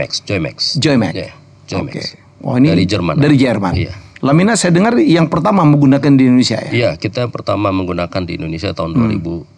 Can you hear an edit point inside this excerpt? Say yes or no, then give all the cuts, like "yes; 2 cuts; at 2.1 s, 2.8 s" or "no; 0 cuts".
no; 0 cuts